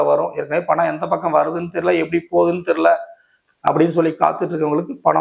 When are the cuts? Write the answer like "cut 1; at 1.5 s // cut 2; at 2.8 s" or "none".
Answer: none